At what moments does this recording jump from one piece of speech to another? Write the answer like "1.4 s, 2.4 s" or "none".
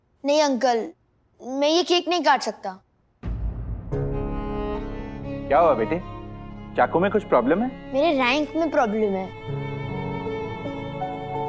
7.8 s